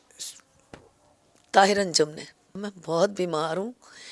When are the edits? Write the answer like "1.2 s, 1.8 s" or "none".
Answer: none